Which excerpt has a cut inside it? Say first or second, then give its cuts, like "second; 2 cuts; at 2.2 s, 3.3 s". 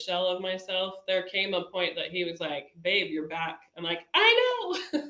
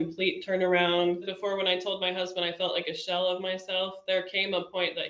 second; 1 cut; at 1.3 s